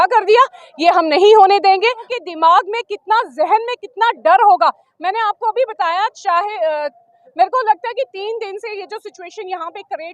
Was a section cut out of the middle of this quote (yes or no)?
yes